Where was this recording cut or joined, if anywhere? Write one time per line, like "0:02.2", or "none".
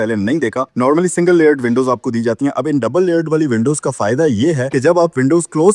0:04.6